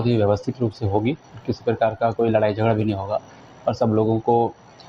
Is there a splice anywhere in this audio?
no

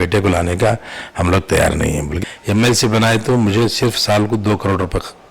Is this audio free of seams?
no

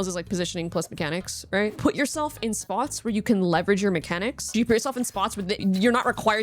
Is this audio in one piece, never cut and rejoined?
no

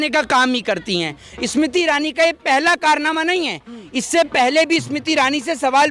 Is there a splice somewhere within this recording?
no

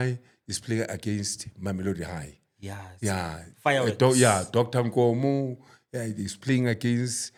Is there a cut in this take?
no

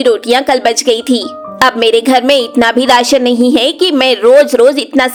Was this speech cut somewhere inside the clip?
no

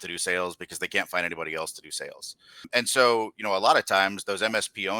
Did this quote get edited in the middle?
yes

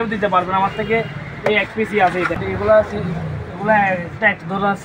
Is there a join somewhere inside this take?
yes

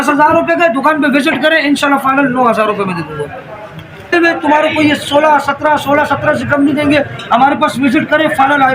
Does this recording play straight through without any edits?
no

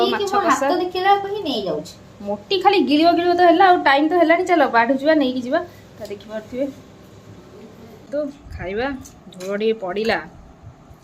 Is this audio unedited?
no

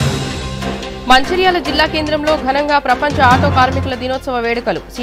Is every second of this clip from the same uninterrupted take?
no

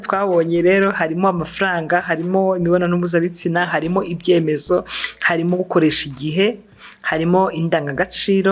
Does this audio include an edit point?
no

